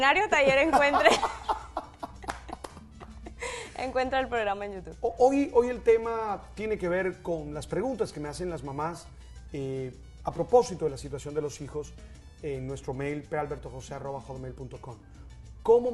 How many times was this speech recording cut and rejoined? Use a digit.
0